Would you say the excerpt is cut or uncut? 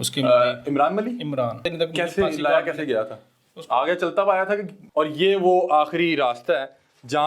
cut